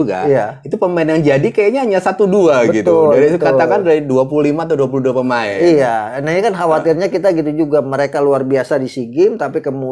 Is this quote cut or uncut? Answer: uncut